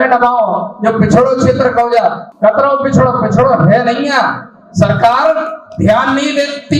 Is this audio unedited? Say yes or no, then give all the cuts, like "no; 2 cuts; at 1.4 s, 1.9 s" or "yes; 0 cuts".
no; 1 cut; at 2.3 s